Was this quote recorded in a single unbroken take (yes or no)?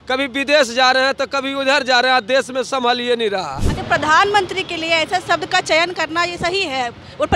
yes